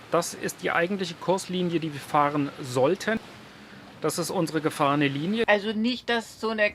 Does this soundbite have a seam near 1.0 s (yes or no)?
no